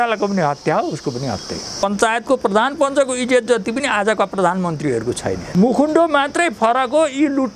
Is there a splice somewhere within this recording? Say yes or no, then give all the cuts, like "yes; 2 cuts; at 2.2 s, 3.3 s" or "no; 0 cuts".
yes; 2 cuts; at 1.8 s, 5.4 s